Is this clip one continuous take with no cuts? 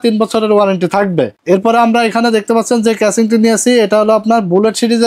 yes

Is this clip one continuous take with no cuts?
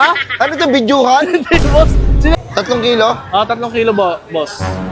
no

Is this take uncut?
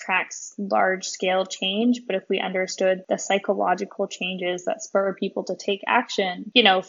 yes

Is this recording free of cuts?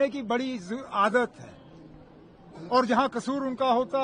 yes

